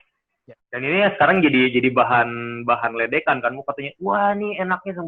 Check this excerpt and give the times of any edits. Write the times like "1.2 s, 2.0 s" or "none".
none